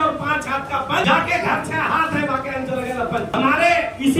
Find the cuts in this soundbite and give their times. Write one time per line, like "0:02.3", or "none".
0:01.0
0:03.3